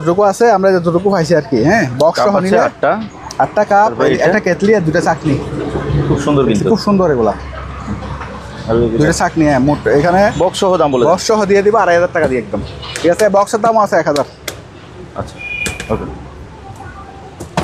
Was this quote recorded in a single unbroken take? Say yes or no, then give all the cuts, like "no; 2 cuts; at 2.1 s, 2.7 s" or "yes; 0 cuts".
yes; 0 cuts